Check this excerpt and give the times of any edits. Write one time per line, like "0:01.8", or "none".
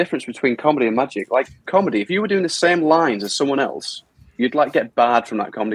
0:01.7